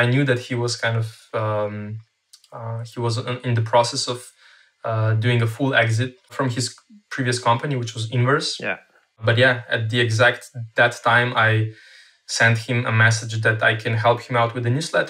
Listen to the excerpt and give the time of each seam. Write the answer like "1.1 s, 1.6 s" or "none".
6.3 s, 9.2 s